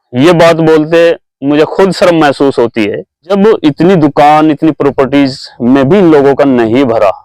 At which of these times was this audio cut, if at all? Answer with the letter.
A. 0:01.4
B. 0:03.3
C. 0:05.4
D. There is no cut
B